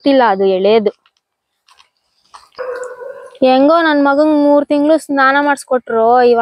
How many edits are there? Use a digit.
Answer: 1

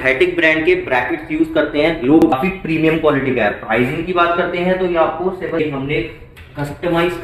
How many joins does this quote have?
2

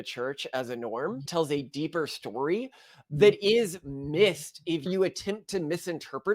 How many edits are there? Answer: 3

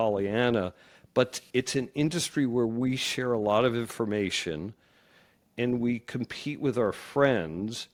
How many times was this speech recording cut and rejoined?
0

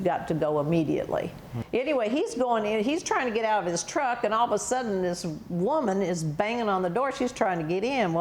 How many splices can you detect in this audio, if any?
1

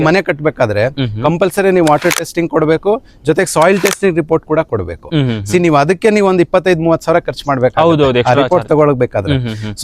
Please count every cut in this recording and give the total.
0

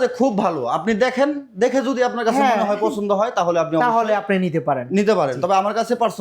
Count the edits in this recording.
0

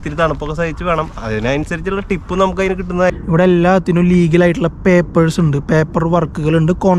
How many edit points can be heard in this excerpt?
1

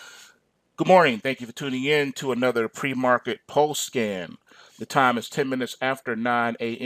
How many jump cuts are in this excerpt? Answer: 0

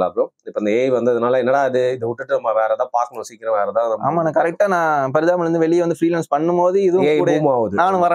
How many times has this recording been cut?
0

